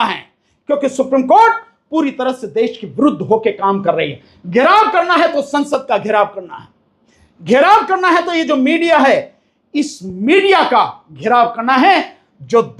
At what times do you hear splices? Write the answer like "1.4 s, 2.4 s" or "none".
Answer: none